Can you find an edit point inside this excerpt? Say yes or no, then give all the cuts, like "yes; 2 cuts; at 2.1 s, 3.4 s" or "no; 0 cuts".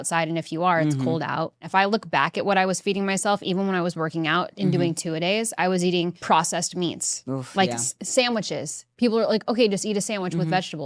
yes; 2 cuts; at 1.6 s, 6.2 s